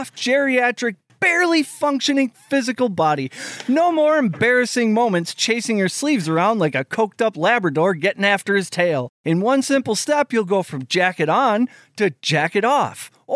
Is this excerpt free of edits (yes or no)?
no